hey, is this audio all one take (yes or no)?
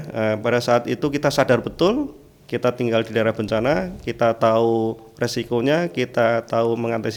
yes